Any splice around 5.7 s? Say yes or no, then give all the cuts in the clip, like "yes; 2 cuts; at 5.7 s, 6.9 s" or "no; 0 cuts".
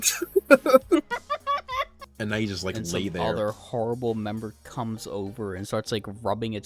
no; 1 cut; at 2.0 s